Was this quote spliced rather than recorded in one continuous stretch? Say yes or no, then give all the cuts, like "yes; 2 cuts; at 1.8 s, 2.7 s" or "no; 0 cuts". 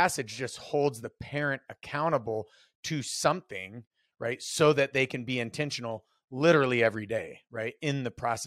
no; 0 cuts